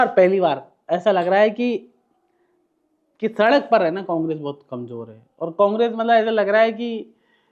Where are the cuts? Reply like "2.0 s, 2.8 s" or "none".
none